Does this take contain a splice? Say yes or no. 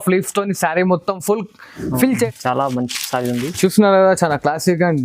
yes